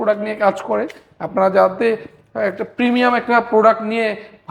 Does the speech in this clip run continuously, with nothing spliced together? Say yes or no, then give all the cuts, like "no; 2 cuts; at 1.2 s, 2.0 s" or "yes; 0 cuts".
yes; 0 cuts